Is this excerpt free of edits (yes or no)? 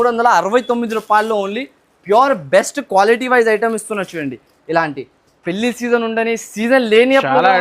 yes